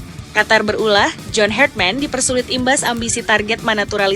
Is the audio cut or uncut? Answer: uncut